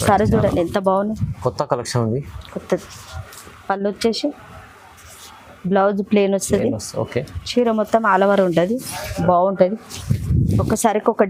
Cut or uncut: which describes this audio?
uncut